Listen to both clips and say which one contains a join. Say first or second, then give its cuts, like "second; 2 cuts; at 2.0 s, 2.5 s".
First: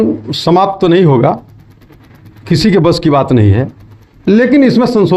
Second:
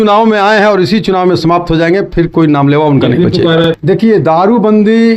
second; 1 cut; at 3.6 s